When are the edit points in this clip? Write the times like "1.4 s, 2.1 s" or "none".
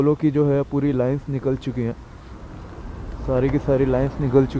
none